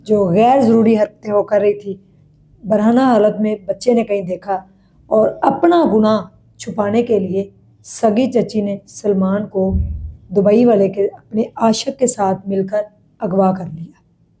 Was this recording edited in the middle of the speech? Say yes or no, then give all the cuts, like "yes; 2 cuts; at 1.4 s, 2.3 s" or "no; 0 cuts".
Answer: no; 0 cuts